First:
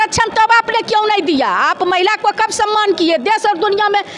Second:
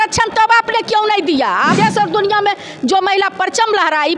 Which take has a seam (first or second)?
second